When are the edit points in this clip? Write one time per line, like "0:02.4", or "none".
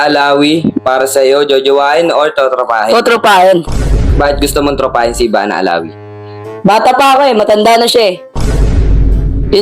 0:04.1